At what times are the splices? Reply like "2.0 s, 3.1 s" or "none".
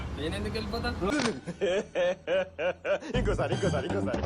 1.1 s